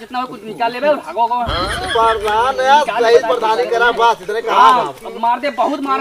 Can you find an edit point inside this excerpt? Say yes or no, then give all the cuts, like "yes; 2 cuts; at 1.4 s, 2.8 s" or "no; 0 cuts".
no; 0 cuts